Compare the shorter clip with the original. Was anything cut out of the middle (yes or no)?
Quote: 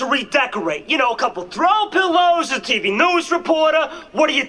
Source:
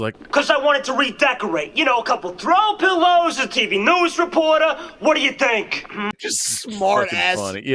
no